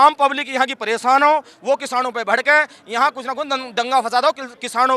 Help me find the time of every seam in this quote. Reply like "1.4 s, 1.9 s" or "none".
none